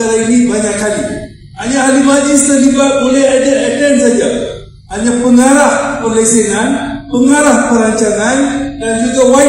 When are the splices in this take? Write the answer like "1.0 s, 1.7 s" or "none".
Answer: none